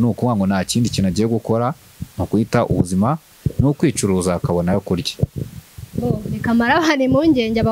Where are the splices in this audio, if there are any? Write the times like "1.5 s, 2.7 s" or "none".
none